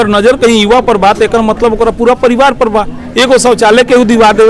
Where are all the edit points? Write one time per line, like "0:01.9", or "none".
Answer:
none